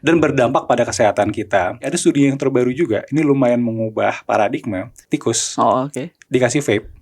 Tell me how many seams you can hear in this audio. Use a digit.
2